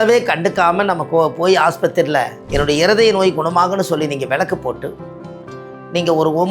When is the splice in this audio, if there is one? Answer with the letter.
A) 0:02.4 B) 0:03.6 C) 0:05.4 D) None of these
A